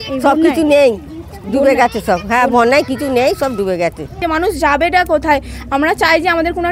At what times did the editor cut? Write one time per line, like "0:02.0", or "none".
0:04.2